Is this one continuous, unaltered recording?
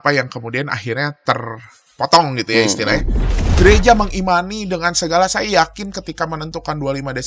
no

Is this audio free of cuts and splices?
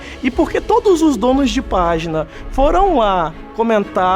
no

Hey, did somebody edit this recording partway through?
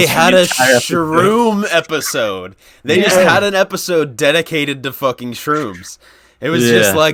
no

